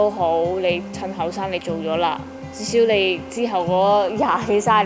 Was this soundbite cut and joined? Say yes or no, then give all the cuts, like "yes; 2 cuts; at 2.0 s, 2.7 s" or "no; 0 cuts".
no; 0 cuts